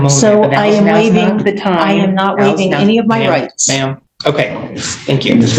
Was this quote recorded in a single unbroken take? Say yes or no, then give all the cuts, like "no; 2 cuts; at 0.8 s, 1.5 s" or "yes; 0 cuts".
yes; 0 cuts